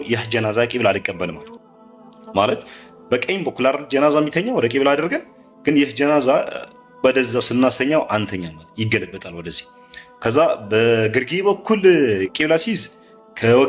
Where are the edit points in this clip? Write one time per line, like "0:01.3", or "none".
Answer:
none